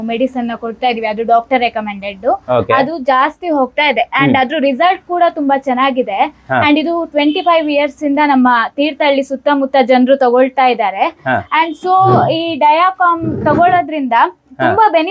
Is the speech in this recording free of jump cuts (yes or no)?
yes